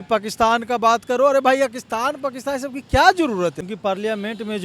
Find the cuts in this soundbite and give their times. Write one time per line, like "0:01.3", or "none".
0:03.6